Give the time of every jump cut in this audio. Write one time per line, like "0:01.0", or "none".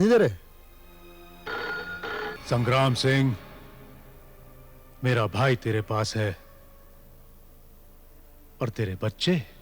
0:02.3